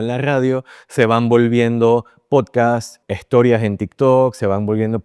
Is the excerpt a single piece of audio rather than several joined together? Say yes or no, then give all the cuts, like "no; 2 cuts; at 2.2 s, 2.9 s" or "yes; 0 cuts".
no; 1 cut; at 3.0 s